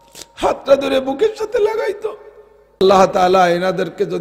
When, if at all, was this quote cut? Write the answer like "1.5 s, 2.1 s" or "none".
2.8 s